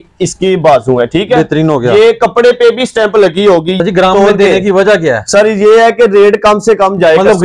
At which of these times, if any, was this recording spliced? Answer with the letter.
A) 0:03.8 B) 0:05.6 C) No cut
A